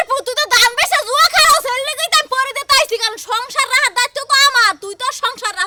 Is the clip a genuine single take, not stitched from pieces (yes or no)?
yes